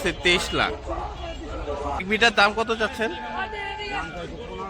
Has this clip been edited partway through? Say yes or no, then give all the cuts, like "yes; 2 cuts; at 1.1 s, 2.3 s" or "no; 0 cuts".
yes; 1 cut; at 2.0 s